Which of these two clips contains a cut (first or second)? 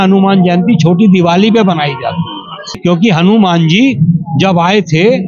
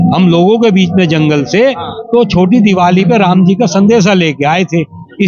first